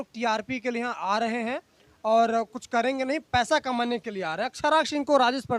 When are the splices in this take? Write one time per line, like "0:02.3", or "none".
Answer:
none